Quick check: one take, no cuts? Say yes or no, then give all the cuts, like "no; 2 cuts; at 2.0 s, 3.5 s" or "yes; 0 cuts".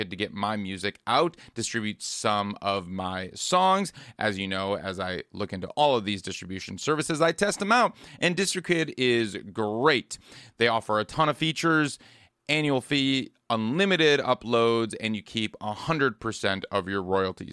yes; 0 cuts